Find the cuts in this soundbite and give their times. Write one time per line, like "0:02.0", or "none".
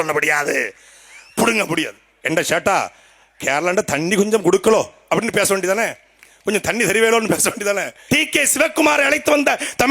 0:02.1
0:08.0